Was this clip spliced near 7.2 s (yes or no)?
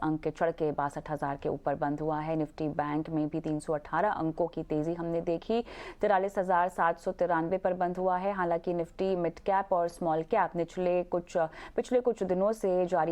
no